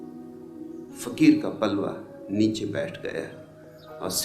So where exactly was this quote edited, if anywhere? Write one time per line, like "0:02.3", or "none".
0:01.2